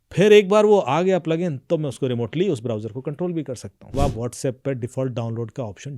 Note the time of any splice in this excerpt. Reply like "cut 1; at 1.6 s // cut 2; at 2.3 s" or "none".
cut 1; at 3.9 s